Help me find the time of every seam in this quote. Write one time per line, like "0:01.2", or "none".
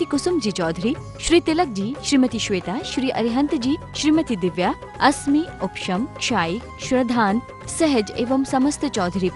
none